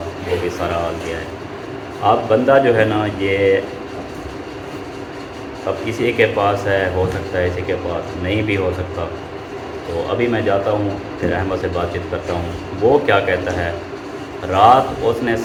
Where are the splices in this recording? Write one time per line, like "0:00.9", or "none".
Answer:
none

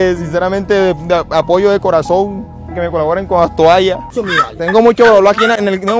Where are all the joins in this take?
0:04.2

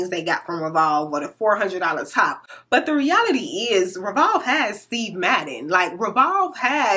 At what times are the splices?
none

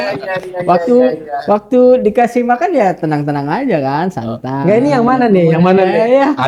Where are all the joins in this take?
none

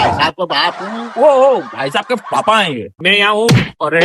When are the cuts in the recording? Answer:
0:02.9

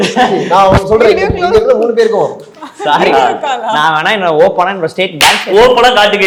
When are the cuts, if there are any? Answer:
none

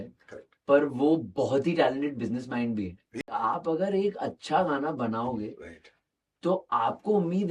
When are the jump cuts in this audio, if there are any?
0:03.2

